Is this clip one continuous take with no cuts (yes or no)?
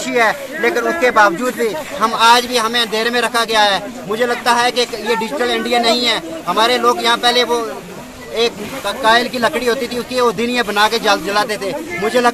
yes